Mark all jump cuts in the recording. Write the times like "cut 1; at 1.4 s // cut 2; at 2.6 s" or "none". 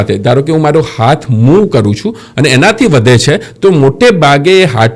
none